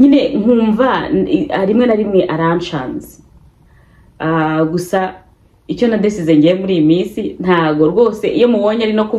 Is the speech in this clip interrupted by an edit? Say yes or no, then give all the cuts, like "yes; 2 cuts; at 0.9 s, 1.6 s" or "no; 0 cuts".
no; 0 cuts